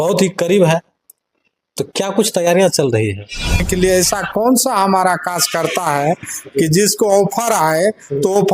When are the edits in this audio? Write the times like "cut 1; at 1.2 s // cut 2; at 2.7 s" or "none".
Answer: cut 1; at 3.6 s